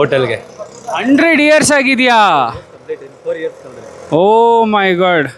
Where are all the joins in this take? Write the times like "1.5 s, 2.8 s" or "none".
none